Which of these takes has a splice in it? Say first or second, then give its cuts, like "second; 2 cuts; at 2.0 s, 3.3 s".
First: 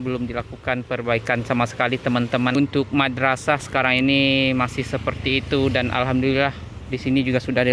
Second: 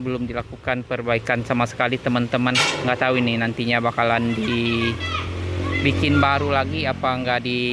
first; 1 cut; at 2.5 s